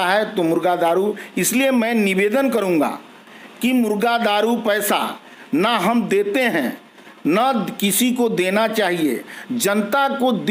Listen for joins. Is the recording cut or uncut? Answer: uncut